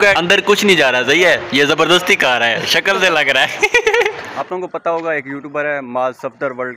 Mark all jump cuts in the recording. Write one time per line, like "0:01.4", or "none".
0:04.3